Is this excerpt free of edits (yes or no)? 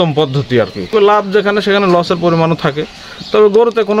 no